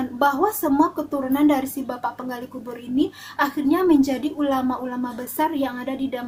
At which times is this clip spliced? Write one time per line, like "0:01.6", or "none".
none